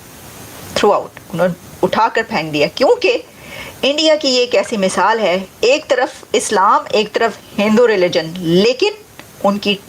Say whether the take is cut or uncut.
cut